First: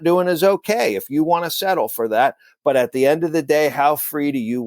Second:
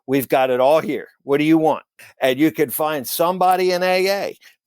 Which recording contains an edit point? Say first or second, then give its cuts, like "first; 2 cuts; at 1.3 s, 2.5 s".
second; 1 cut; at 2.0 s